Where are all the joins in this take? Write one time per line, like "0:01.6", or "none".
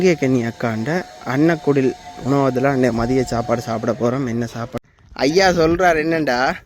0:04.7